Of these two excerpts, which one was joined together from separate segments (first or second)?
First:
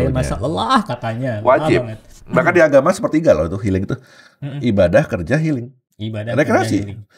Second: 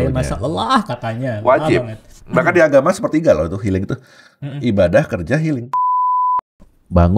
second